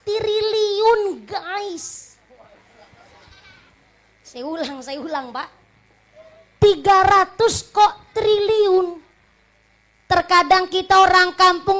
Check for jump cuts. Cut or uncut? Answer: cut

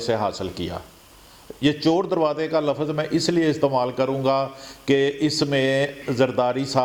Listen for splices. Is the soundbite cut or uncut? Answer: uncut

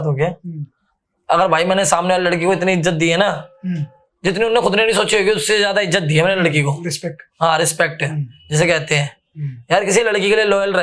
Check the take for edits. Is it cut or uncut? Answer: uncut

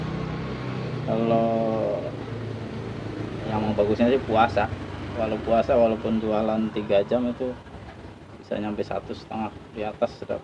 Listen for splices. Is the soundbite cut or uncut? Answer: uncut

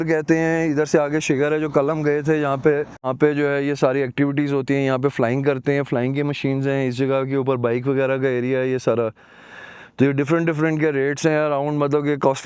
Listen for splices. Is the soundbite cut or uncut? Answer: cut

